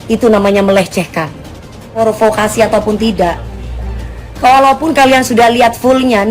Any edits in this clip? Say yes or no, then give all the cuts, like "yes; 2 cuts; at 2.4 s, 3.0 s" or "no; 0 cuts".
yes; 1 cut; at 2.0 s